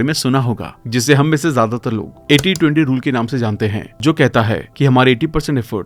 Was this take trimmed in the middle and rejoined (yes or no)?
no